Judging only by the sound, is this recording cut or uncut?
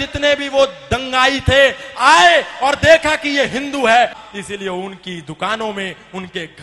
cut